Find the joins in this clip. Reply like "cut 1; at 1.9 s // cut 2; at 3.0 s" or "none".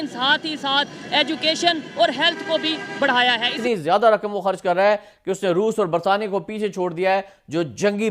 cut 1; at 3.5 s